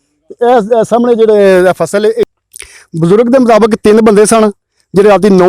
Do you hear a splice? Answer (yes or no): yes